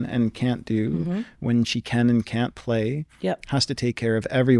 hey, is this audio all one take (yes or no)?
yes